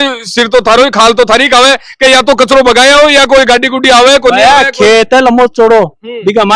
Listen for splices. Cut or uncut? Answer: uncut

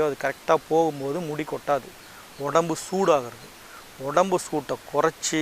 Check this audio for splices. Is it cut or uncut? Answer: cut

